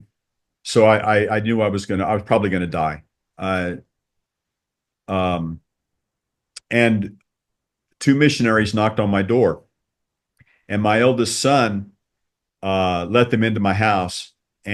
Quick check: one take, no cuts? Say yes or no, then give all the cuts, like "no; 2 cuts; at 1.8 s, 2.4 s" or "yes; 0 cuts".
yes; 0 cuts